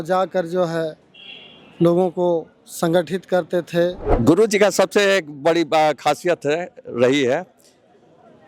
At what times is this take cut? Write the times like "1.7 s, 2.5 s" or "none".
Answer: 4.0 s